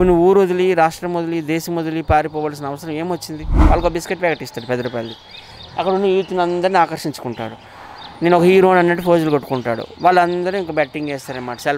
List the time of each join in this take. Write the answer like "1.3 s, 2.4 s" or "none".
3.5 s